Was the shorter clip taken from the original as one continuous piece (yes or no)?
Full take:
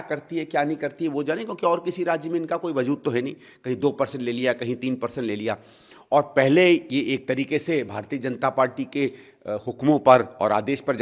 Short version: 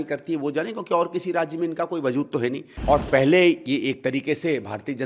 no